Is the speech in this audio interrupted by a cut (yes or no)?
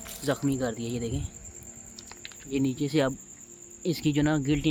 no